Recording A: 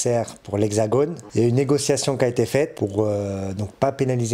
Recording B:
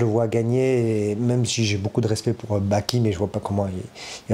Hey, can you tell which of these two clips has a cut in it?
A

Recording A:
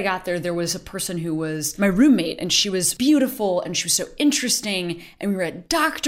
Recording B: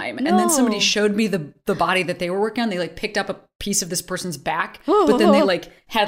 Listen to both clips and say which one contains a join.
A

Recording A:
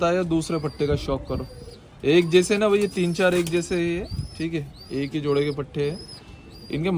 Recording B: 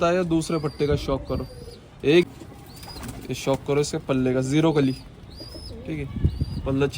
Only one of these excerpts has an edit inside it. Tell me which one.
B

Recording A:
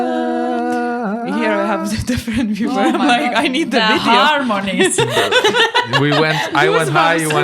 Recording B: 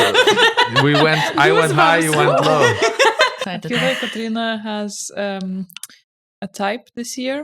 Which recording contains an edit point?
B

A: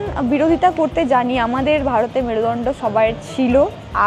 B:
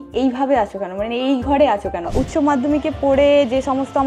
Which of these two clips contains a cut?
B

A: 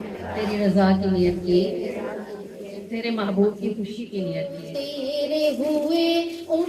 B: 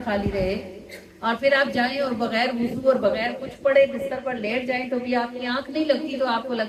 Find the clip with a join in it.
A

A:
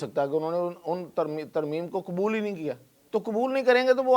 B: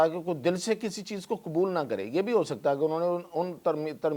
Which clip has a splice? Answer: A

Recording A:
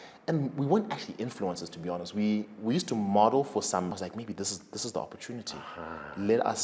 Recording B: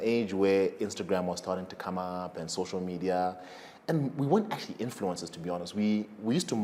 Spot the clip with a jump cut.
A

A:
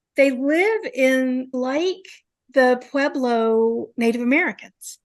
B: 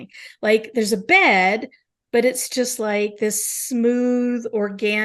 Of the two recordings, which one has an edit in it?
A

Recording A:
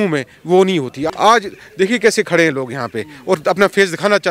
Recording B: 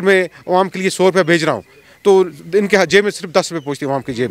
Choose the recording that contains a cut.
A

